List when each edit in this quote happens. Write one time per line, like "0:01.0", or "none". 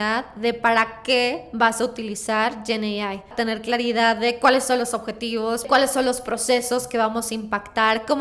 0:03.3
0:05.7